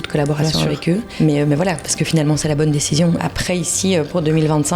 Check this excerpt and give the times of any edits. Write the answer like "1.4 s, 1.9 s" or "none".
1.1 s, 3.2 s

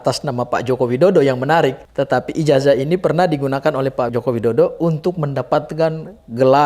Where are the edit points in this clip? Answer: 1.9 s, 4.1 s

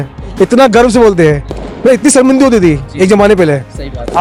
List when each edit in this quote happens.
none

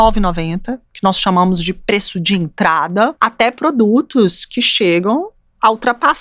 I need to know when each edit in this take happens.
3.1 s

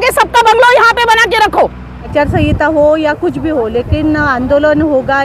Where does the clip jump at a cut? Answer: 2.1 s

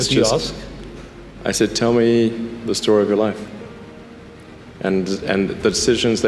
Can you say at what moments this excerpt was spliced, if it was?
none

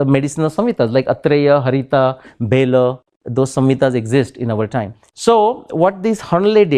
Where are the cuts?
5.0 s

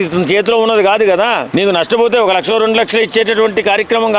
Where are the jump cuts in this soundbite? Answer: 1.4 s

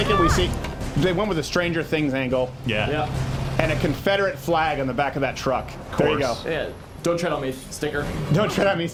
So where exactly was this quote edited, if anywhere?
none

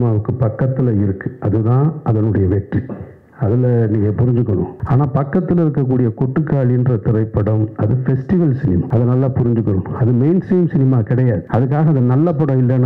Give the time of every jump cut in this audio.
4.8 s, 8.9 s, 11.4 s

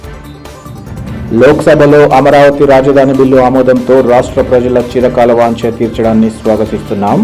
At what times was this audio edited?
none

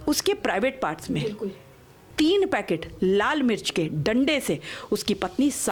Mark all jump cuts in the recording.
none

